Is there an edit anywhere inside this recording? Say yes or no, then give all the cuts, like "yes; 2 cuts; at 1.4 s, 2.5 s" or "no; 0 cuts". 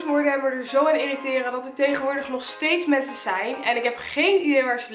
no; 0 cuts